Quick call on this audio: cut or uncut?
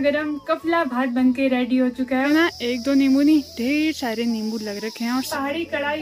cut